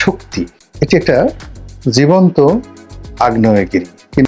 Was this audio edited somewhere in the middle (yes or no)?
no